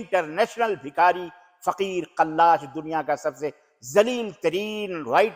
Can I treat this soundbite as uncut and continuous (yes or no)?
yes